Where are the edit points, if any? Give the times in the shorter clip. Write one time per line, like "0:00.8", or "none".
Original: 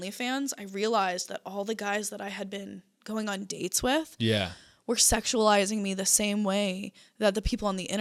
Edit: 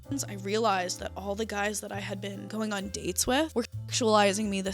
0:02.4
0:03.5